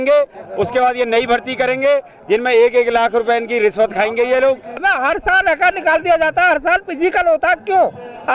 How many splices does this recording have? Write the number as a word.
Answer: one